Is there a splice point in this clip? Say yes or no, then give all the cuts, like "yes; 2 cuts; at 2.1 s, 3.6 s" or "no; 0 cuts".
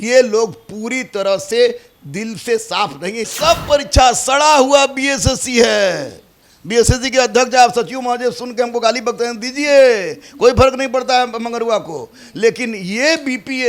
yes; 1 cut; at 3.3 s